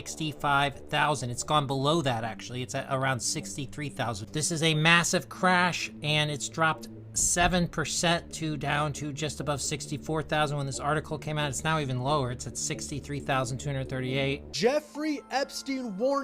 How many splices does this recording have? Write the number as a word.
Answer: one